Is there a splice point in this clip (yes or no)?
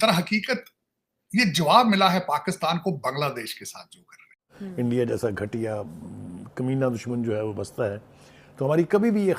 yes